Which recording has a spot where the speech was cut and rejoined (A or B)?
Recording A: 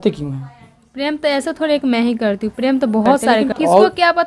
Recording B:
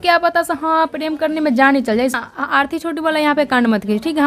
B